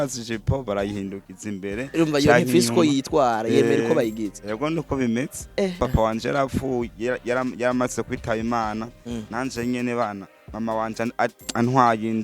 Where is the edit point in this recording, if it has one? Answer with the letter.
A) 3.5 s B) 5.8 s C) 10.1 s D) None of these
B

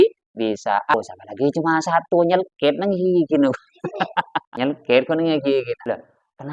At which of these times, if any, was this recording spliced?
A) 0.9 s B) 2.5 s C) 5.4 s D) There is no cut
A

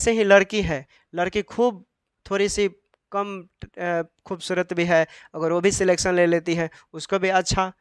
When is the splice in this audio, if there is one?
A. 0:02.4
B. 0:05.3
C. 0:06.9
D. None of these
D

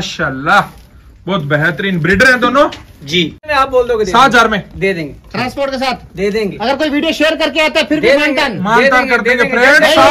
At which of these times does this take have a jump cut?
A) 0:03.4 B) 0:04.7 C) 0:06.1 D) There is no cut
A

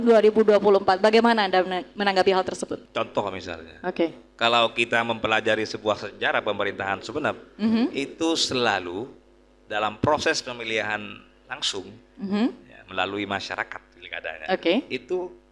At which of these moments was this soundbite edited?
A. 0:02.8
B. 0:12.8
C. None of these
A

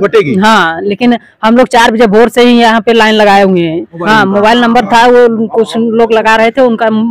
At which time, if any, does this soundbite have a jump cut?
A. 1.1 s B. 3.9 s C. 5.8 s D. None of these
B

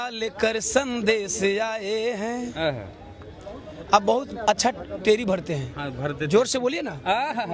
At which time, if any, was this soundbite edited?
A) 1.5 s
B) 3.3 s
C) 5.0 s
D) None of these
D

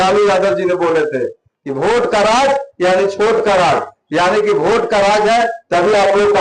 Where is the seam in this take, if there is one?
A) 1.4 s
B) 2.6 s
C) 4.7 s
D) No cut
D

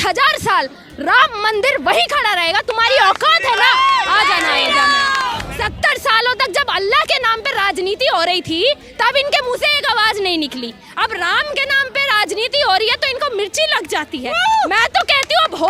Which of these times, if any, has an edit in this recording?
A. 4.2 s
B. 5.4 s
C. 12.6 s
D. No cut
B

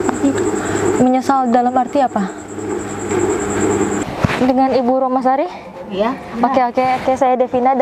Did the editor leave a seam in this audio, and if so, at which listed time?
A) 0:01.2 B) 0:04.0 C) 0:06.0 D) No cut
B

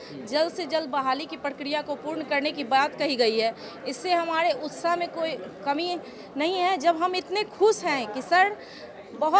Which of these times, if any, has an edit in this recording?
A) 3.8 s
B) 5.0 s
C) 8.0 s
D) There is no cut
D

